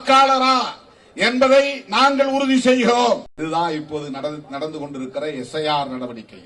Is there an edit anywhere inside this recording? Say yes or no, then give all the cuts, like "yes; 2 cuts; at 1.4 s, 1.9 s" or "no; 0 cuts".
yes; 1 cut; at 3.3 s